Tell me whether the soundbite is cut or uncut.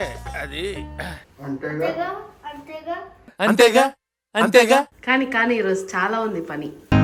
uncut